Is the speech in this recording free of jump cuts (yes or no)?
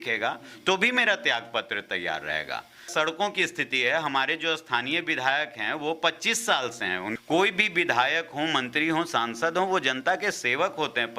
no